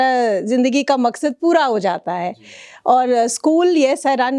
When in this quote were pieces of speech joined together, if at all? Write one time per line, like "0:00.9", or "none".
none